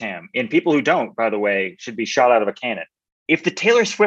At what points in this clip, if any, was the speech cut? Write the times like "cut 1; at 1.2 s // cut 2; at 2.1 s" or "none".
cut 1; at 3.2 s